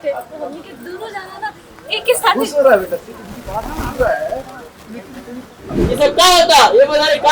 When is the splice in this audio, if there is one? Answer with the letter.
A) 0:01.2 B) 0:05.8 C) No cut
B